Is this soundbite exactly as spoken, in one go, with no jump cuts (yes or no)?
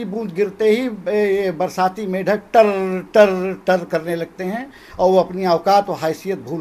yes